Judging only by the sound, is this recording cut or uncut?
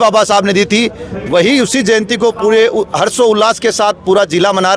uncut